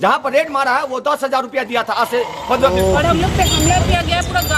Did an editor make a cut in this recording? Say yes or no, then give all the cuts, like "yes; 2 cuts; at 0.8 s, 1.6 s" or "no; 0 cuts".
yes; 1 cut; at 2.8 s